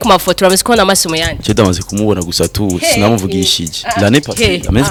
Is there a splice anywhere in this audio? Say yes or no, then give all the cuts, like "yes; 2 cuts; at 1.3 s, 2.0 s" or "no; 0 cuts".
no; 0 cuts